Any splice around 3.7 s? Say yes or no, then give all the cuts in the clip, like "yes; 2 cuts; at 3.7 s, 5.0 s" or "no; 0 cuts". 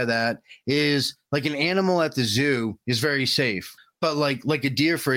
yes; 1 cut; at 3.7 s